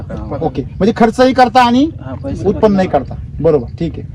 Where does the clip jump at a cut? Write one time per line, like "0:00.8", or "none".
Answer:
none